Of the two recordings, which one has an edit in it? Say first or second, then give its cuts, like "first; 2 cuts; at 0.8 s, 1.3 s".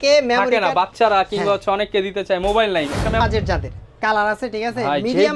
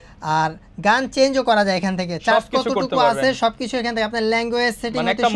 first; 1 cut; at 3.2 s